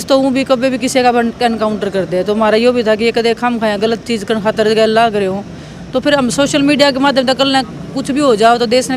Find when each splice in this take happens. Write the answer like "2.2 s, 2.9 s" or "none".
none